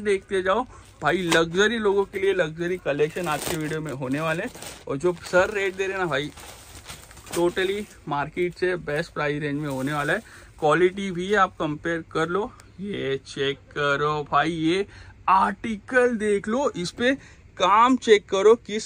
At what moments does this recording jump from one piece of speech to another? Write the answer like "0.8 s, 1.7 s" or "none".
none